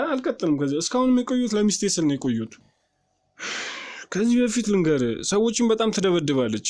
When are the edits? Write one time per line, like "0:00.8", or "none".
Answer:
0:02.6